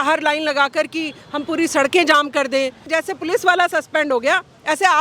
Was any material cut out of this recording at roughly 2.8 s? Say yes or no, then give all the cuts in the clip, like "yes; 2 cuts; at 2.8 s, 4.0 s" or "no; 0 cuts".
yes; 1 cut; at 2.8 s